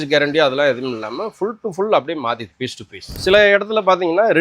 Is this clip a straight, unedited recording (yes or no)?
no